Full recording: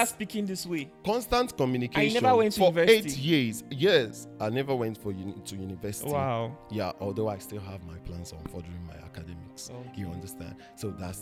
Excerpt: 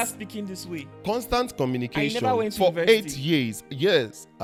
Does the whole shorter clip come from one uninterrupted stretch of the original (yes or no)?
yes